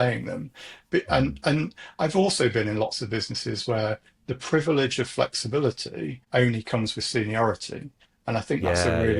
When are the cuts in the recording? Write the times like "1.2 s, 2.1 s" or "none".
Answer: 6.1 s